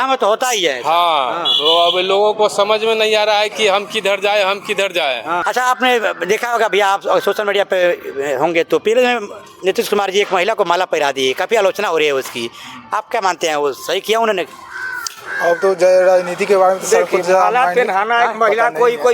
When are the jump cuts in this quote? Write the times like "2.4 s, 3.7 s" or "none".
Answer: 5.4 s